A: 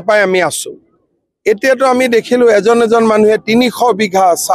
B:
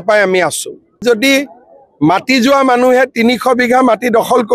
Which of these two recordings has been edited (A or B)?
B